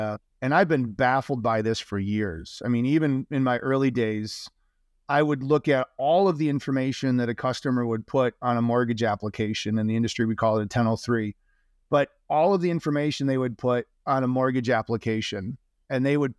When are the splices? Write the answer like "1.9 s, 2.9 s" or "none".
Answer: none